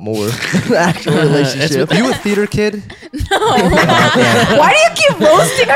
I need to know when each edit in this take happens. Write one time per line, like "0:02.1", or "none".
0:01.9